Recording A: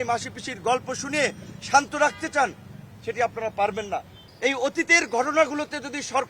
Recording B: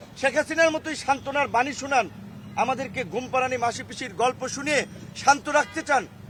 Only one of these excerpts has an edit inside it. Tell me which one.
A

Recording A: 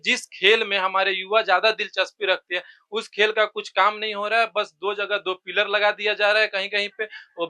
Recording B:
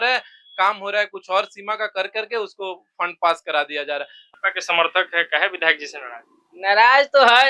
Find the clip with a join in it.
B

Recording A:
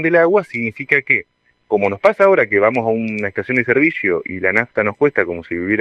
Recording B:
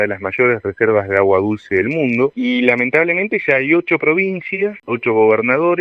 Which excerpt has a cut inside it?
B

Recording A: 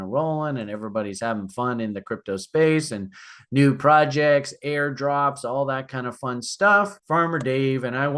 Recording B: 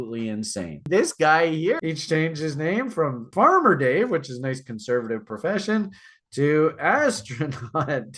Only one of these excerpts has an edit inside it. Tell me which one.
B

